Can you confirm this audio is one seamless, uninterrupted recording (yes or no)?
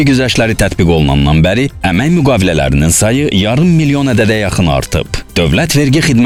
yes